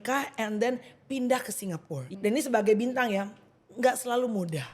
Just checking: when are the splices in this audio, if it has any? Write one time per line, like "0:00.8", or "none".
0:02.0